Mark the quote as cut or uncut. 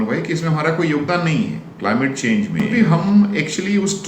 cut